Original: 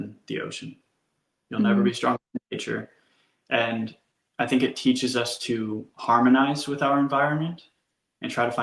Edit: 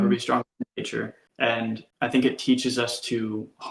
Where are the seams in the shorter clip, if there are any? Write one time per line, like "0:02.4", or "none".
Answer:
0:01.2
0:01.9